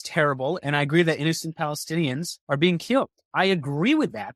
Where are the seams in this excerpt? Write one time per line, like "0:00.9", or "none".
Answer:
0:02.3
0:03.2